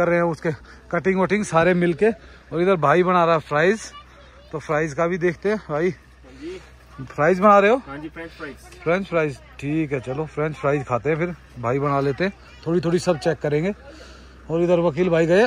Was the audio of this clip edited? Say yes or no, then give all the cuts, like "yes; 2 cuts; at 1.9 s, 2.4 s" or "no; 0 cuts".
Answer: no; 0 cuts